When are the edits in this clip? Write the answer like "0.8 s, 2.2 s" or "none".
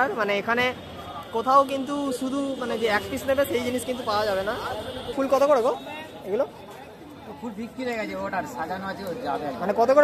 5.1 s